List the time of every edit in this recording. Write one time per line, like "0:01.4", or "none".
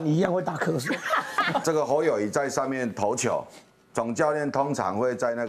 0:01.6